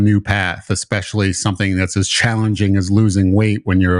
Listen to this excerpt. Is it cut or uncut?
uncut